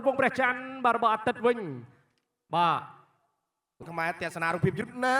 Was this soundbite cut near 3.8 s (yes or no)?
yes